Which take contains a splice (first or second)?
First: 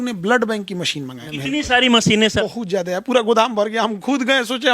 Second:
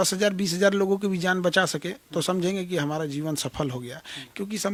first